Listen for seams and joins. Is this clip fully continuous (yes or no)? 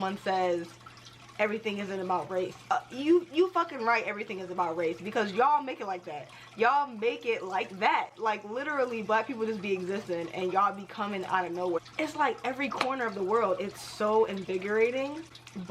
yes